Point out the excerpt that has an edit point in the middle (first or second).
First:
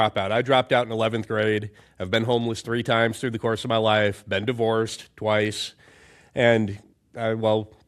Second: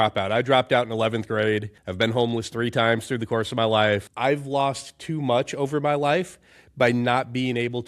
second